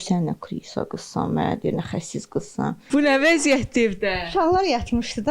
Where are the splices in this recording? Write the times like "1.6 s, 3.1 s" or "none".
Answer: 2.8 s